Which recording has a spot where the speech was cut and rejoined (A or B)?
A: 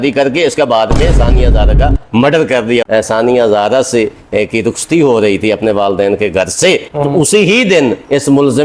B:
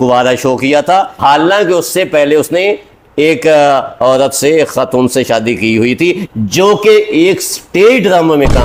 A